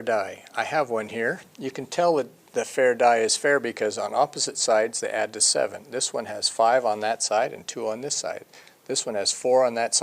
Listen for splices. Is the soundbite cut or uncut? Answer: cut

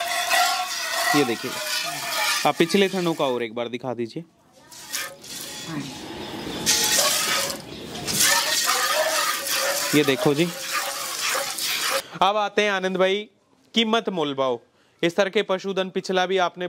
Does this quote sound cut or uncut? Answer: cut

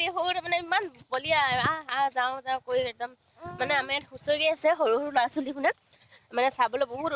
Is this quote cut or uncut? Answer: uncut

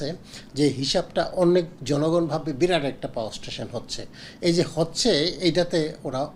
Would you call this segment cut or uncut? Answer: uncut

